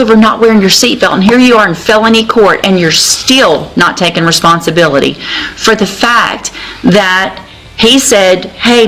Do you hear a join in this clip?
no; 0 cuts

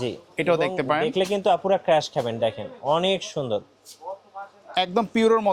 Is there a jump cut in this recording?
no; 0 cuts

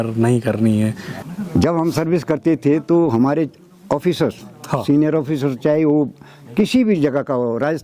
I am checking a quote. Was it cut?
yes; 1 cut; at 1.1 s

